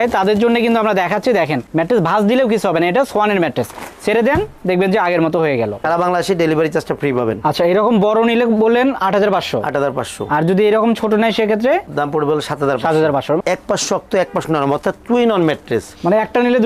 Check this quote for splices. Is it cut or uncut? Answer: cut